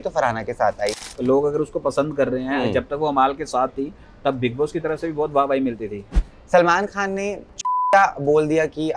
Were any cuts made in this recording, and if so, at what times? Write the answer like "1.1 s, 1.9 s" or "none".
1.1 s, 6.3 s, 7.5 s